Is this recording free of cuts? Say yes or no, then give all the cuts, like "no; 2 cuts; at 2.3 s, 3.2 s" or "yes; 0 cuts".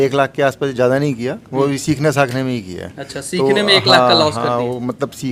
yes; 0 cuts